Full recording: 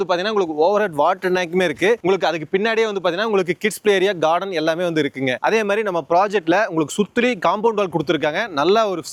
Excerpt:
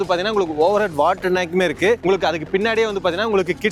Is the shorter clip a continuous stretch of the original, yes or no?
yes